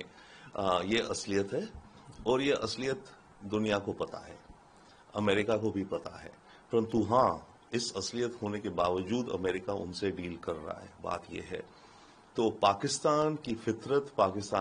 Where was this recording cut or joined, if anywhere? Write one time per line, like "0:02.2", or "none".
none